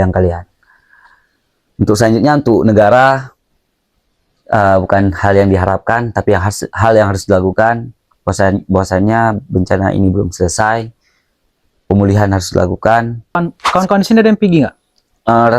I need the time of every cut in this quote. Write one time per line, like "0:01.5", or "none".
0:13.4